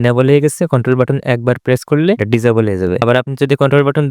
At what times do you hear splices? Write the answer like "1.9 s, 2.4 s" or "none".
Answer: none